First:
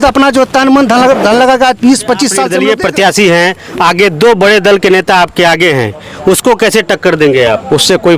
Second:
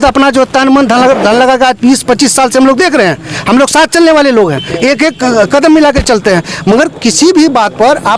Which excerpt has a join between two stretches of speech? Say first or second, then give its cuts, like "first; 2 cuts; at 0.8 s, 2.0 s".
first; 1 cut; at 2.5 s